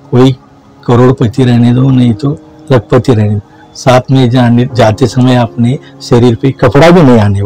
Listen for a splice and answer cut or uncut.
uncut